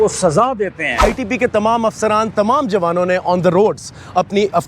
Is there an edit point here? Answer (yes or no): yes